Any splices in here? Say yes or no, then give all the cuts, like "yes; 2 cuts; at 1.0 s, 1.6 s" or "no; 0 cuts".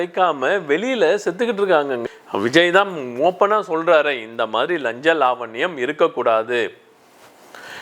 yes; 1 cut; at 2.0 s